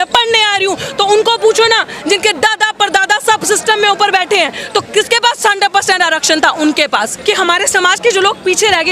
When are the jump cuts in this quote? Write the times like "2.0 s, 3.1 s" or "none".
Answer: 7.1 s